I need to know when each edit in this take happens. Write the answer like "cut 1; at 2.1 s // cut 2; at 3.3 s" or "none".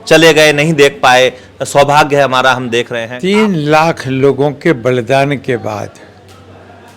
cut 1; at 3.0 s